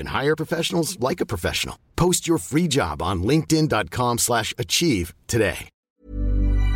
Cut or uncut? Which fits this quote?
cut